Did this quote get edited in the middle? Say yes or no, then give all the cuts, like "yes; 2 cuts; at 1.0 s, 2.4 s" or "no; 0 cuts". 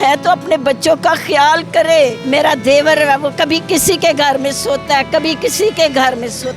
yes; 1 cut; at 2.2 s